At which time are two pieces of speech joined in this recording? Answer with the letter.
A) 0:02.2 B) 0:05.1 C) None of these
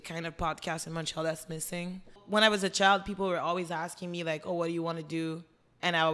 A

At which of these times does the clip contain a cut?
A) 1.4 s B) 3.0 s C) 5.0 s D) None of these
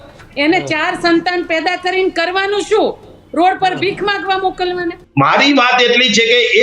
C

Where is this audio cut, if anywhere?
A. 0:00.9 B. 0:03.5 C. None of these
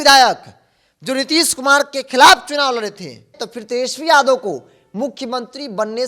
B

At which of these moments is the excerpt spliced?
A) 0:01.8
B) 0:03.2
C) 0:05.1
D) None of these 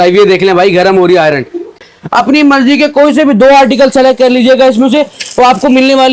A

